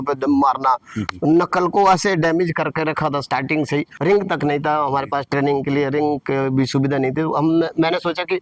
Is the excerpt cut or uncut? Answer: cut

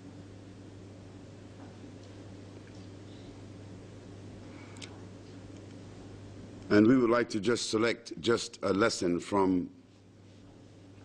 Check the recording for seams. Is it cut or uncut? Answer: cut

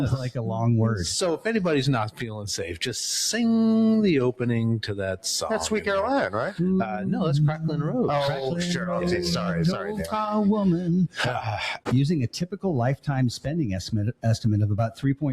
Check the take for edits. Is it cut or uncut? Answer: cut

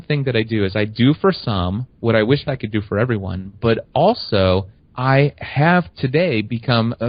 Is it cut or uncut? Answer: uncut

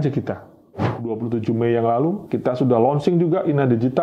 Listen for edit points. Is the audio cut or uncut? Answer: cut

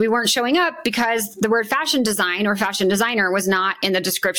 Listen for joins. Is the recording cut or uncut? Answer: uncut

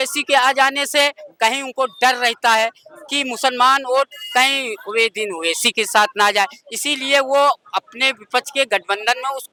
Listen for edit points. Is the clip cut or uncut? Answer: uncut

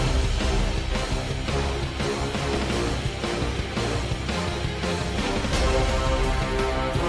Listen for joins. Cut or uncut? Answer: uncut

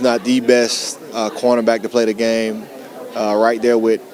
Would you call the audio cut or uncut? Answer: uncut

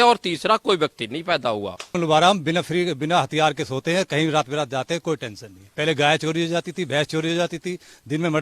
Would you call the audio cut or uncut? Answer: cut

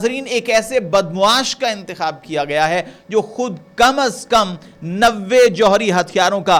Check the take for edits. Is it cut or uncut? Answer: uncut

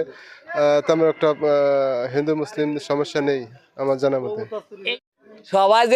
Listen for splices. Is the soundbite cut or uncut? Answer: cut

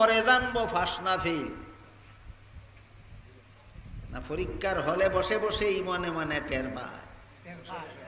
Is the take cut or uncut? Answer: uncut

